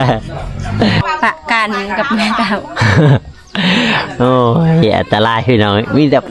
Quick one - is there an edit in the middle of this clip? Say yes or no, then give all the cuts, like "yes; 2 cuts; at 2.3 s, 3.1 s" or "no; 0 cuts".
yes; 1 cut; at 1.0 s